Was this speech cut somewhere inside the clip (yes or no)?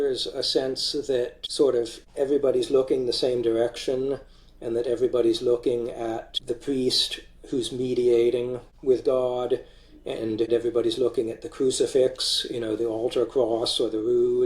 yes